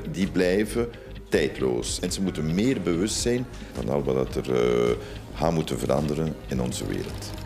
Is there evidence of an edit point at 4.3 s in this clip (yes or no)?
no